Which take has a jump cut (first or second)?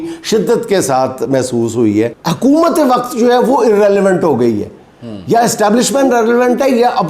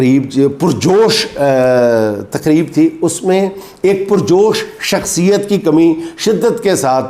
first